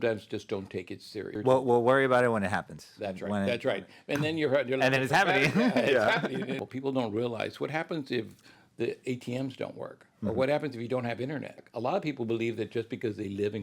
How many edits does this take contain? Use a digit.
3